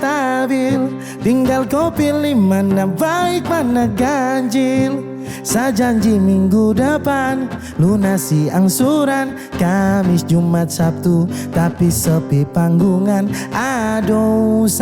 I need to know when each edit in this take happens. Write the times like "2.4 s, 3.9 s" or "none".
none